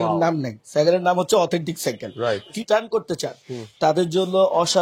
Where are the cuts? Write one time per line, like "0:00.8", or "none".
0:02.5